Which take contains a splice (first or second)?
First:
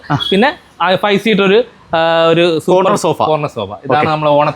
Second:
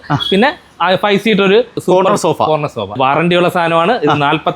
second